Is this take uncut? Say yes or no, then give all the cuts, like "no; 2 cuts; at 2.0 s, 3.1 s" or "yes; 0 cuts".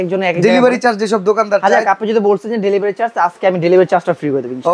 yes; 0 cuts